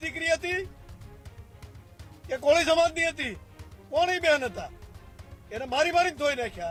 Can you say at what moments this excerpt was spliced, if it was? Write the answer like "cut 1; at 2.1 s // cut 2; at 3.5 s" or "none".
none